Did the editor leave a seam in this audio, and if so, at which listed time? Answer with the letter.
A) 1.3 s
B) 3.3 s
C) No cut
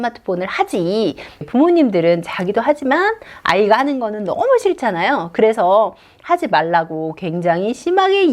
A